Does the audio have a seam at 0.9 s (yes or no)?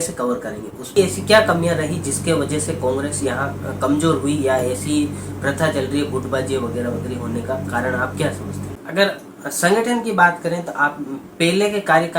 yes